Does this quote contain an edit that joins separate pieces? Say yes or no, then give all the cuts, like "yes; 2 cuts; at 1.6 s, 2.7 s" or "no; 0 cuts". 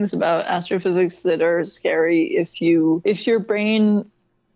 no; 0 cuts